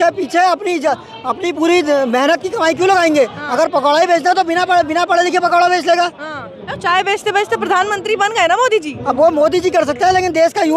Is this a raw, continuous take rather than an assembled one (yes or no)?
yes